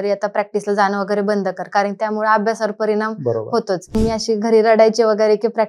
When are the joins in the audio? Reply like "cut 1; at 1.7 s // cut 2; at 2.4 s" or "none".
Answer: cut 1; at 3.9 s